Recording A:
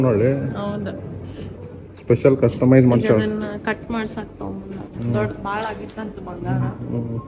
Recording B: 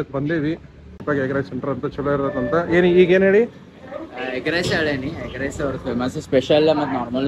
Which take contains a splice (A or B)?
B